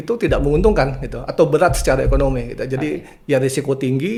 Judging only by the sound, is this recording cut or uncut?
uncut